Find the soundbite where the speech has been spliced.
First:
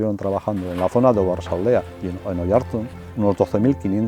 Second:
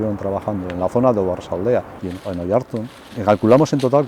first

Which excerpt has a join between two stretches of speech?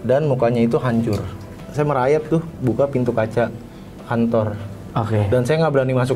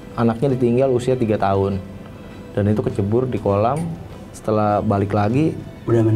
first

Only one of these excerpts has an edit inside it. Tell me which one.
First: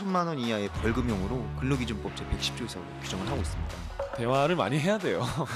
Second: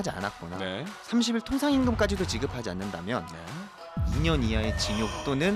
second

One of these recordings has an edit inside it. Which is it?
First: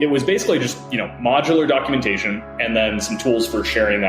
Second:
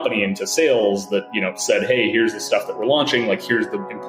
first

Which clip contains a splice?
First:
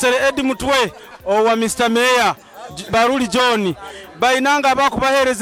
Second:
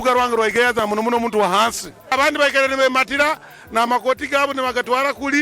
second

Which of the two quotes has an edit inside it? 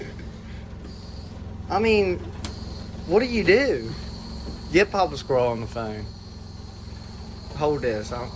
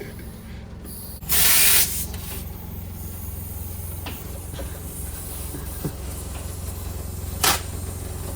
second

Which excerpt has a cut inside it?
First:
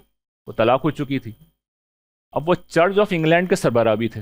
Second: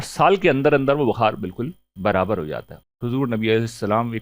second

